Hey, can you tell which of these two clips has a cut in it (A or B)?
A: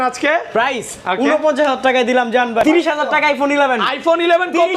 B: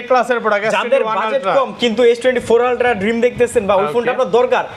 A